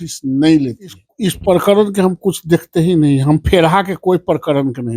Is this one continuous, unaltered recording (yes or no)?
no